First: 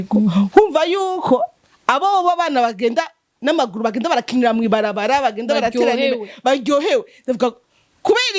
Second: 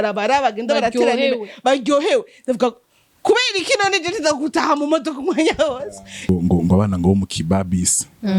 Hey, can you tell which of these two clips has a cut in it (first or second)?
second